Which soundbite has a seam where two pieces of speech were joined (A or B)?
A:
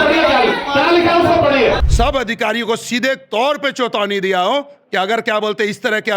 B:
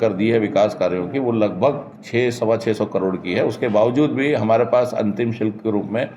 A